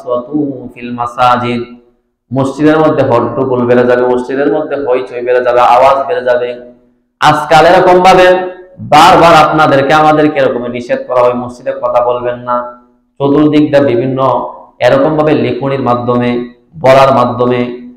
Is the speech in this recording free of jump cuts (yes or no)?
yes